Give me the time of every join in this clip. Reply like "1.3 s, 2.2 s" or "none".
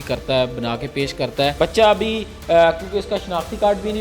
1.5 s